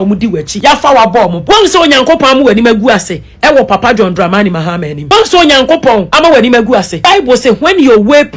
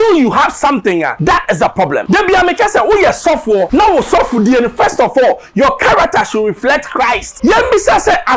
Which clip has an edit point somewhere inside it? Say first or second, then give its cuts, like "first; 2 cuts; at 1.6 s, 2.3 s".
second; 4 cuts; at 1.1 s, 2.0 s, 3.7 s, 7.3 s